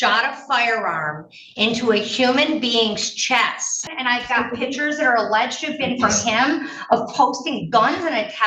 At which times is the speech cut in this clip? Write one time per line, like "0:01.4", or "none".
0:03.9

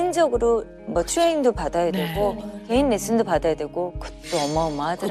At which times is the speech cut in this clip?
none

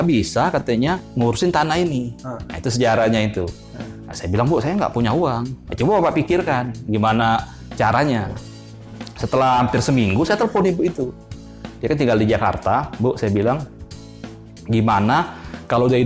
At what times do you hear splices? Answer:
none

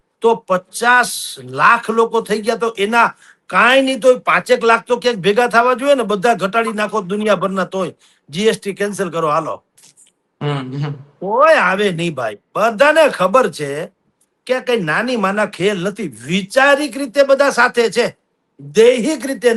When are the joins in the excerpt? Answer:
none

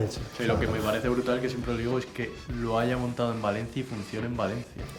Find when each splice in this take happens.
none

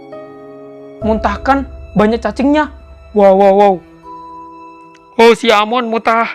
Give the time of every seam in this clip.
none

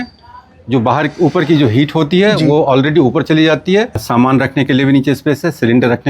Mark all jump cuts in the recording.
0:04.0

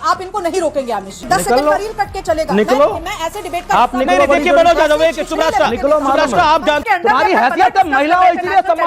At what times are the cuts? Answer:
0:01.3
0:06.8

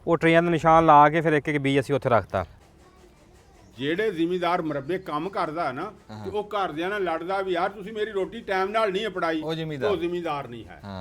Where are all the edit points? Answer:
0:02.6

